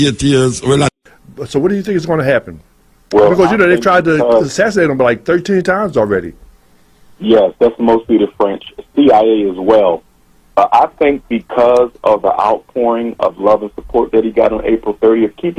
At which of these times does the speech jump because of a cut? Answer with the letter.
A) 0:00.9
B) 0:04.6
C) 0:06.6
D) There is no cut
A